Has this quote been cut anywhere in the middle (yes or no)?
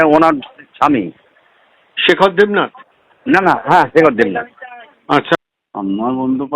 yes